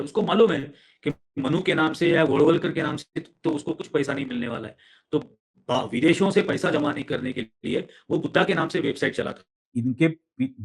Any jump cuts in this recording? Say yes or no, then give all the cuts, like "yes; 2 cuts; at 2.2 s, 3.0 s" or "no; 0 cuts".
yes; 1 cut; at 9.6 s